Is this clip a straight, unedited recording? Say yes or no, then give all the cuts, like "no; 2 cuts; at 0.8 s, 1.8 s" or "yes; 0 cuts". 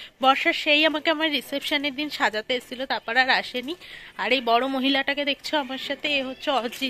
yes; 0 cuts